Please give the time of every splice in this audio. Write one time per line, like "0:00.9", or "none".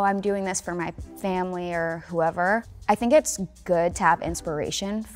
0:02.7